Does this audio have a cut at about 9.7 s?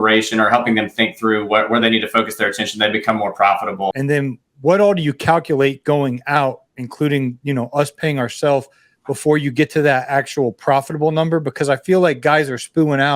no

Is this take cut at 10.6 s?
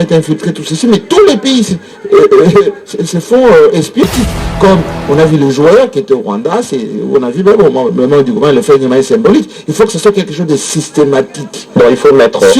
no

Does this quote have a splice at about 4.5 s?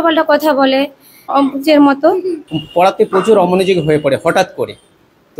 no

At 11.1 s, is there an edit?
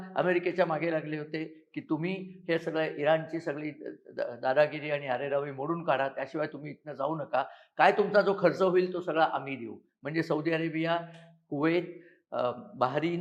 no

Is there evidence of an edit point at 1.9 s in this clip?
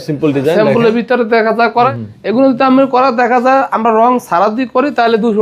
yes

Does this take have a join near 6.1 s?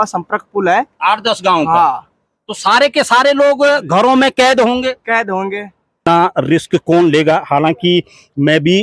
yes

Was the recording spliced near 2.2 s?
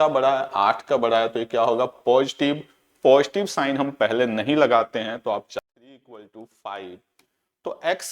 no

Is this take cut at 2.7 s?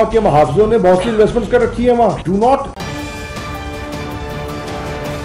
yes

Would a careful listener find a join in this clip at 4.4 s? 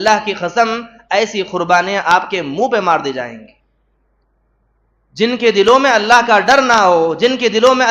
no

